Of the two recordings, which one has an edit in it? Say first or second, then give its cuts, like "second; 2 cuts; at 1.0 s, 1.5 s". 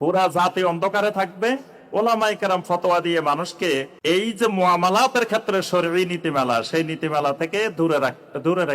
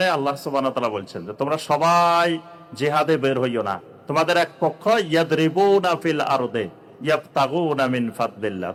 first; 1 cut; at 3.9 s